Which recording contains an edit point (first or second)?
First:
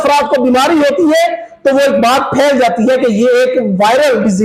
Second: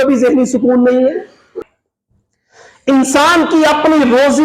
second